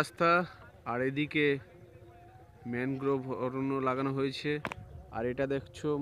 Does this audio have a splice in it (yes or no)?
no